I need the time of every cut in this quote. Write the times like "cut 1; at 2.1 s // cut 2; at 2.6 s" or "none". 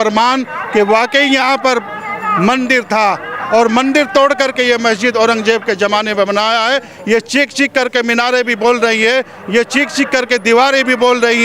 none